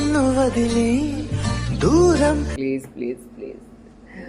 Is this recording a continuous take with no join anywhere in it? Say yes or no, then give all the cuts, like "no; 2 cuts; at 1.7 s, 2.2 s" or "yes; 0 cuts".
yes; 0 cuts